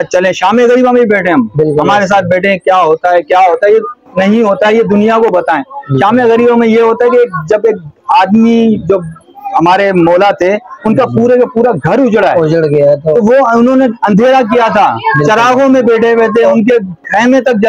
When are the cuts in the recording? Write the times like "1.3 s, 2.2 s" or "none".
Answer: none